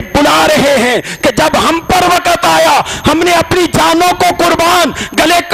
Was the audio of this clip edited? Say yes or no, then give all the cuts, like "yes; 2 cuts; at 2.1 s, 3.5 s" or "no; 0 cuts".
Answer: no; 0 cuts